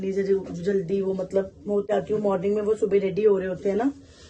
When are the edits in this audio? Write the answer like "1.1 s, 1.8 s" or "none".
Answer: 1.9 s